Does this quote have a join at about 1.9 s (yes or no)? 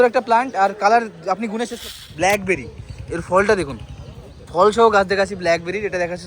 yes